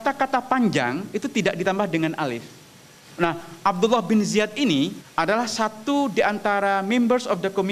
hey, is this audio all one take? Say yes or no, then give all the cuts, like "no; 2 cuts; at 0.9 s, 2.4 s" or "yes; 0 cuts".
no; 2 cuts; at 3.3 s, 5.0 s